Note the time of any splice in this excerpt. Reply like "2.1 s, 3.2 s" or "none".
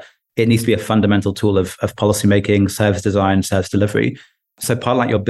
none

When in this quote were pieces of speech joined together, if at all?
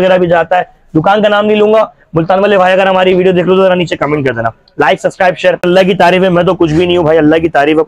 5.6 s

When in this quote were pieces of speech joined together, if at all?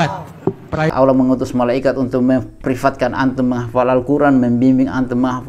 0.9 s

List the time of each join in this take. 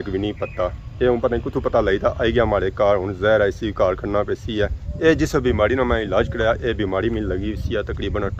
4.8 s

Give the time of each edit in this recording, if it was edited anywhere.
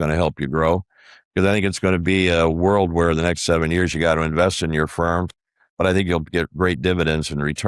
none

